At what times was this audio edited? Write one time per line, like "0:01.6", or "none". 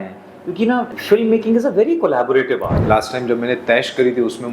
0:00.9
0:02.8